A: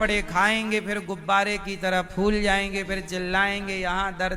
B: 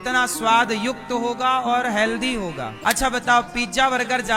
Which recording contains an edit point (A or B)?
B